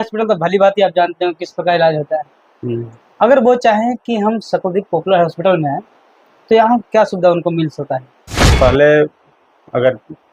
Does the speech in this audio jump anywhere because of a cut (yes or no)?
yes